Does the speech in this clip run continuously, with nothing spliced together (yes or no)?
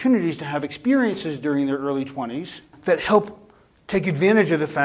no